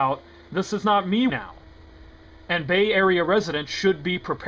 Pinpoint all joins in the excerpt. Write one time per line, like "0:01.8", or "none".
none